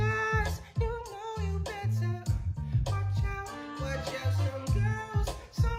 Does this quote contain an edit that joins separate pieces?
no; 0 cuts

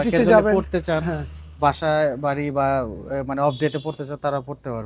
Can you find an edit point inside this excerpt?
no; 0 cuts

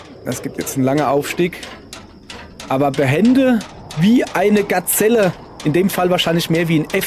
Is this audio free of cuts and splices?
yes; 0 cuts

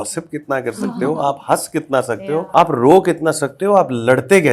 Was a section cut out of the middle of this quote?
yes; 1 cut; at 2.5 s

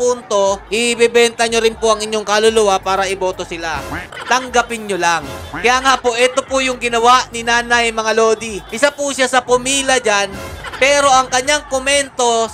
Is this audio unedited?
yes; 0 cuts

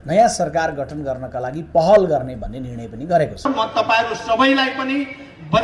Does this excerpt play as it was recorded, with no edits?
no; 1 cut; at 3.5 s

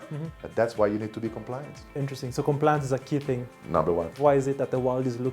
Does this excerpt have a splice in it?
yes; 1 cut; at 4.1 s

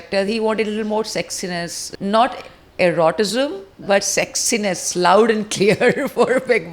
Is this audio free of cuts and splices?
no; 1 cut; at 1.8 s

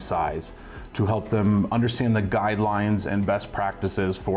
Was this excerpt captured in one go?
yes; 0 cuts

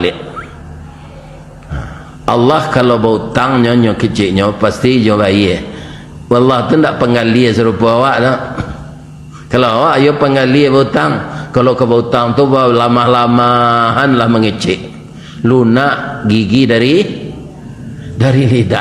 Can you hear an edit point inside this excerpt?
no; 0 cuts

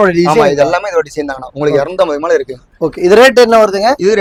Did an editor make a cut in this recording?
no; 0 cuts

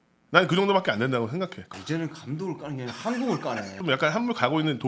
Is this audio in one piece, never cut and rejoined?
no; 2 cuts; at 1.6 s, 3.8 s

